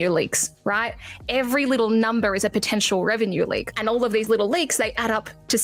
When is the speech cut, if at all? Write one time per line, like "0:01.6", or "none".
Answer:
none